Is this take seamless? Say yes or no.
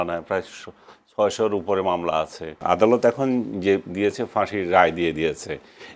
no